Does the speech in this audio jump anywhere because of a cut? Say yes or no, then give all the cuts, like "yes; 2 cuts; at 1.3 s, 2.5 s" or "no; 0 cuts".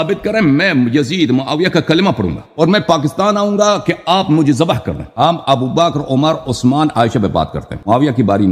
no; 0 cuts